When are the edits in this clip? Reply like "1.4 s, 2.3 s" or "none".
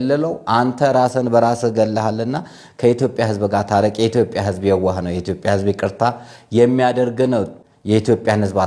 7.6 s